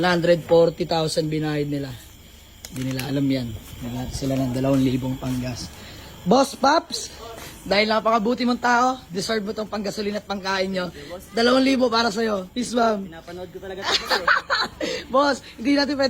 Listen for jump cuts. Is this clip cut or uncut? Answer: uncut